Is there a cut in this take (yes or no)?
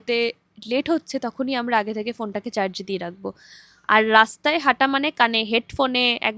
no